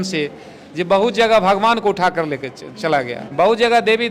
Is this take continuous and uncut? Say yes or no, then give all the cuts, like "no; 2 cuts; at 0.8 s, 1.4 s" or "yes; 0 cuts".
no; 1 cut; at 3.2 s